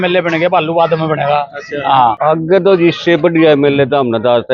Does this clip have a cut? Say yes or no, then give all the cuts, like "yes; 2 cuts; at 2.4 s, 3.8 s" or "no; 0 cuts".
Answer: yes; 1 cut; at 2.2 s